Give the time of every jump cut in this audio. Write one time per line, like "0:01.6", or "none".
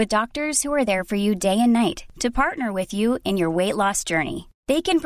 none